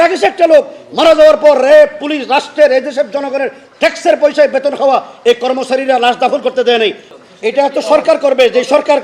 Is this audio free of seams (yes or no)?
no